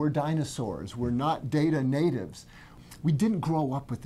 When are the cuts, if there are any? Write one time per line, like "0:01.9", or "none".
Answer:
0:02.7